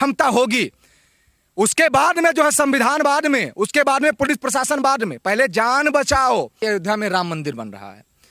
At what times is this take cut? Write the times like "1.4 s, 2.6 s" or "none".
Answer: 6.5 s